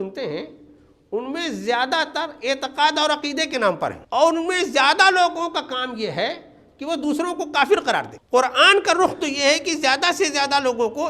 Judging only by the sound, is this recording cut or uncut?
cut